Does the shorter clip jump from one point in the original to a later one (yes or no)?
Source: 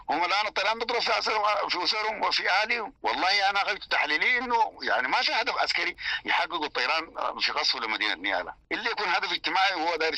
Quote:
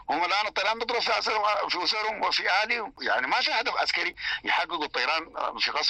yes